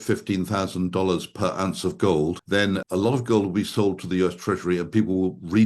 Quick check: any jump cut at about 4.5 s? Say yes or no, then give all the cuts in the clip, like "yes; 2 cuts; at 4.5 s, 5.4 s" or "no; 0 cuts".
no; 1 cut; at 2.6 s